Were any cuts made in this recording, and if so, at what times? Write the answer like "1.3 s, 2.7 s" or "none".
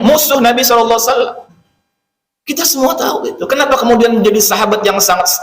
1.5 s